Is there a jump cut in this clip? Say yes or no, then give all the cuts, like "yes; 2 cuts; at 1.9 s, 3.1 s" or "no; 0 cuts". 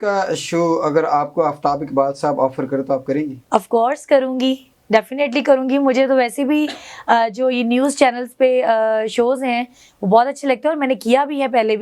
no; 0 cuts